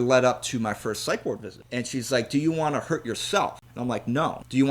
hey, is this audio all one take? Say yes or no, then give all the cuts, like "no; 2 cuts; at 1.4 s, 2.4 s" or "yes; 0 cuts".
no; 1 cut; at 1.6 s